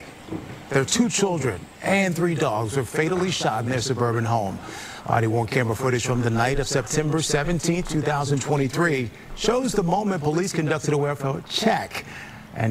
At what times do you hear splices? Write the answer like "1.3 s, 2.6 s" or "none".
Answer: 4.6 s